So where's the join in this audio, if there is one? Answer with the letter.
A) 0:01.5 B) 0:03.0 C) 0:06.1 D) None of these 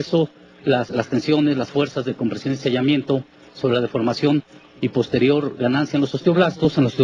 D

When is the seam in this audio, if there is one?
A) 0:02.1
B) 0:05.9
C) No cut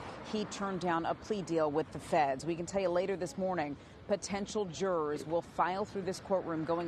A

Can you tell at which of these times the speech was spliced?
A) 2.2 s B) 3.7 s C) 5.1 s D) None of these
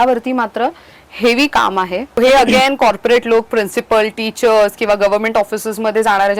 A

